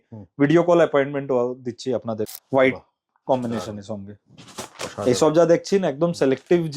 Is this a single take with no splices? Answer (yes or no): no